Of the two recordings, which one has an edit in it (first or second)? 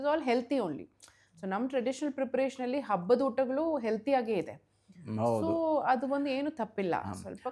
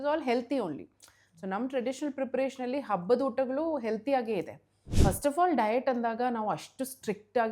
second